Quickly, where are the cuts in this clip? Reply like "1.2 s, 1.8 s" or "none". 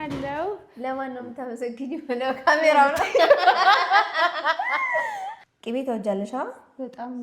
5.3 s